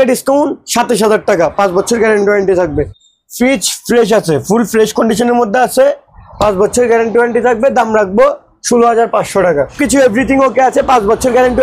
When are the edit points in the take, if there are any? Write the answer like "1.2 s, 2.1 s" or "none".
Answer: 2.9 s, 9.8 s